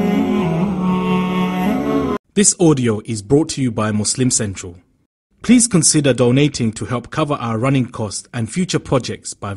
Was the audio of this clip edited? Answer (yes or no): yes